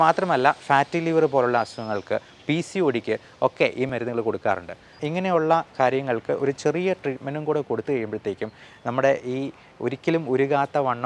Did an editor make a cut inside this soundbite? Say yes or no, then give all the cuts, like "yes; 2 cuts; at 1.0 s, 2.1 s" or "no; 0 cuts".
yes; 2 cuts; at 3.9 s, 5.0 s